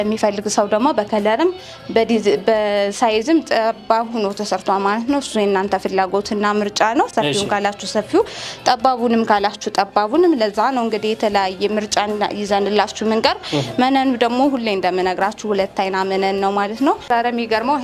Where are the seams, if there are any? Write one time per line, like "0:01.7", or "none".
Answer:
none